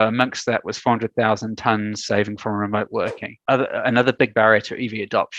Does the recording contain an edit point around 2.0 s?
no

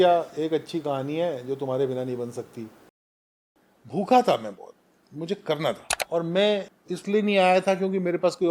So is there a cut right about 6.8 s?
yes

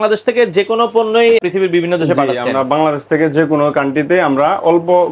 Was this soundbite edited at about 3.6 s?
no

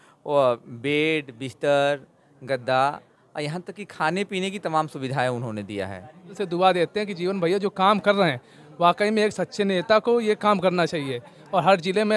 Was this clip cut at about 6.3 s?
yes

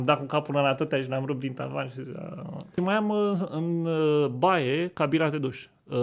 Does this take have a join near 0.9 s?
no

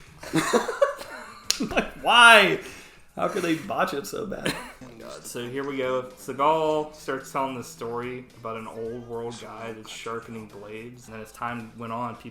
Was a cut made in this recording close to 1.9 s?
no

